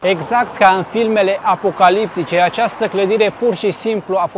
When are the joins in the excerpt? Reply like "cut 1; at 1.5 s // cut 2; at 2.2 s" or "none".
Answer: none